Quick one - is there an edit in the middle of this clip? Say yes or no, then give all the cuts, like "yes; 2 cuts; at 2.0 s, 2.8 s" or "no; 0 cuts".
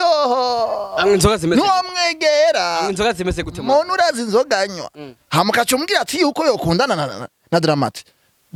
no; 0 cuts